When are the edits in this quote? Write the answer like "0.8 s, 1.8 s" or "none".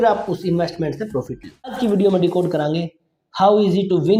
1.9 s